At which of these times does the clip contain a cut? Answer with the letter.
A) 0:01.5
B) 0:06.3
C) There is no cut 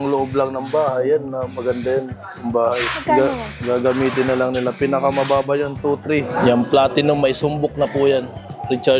B